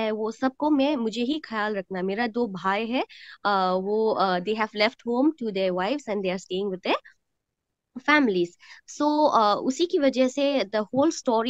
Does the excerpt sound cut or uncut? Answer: uncut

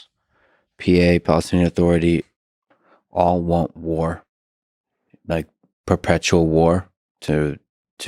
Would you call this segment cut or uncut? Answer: uncut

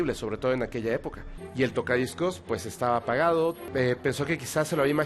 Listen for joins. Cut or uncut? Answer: cut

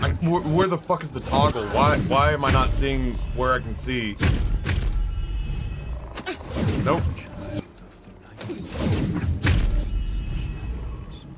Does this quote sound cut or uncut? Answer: cut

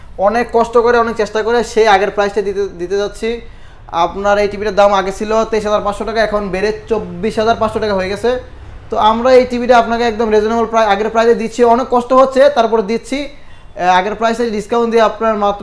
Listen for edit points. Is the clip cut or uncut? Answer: uncut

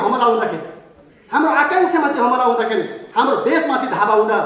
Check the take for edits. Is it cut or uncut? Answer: uncut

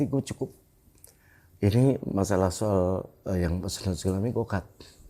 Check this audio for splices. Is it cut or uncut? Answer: uncut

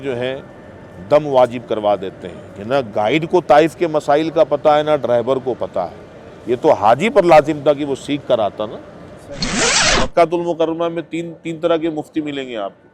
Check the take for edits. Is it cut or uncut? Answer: cut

